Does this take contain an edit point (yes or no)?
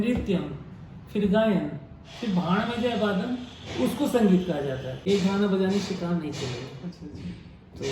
yes